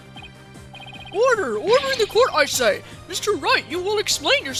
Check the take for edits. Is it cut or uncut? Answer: uncut